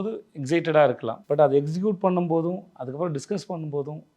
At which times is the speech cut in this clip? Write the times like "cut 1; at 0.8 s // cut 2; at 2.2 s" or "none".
cut 1; at 1.1 s